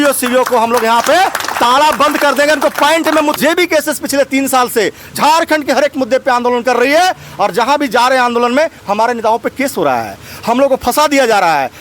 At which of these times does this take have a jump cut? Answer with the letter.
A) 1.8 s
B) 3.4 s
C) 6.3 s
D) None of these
B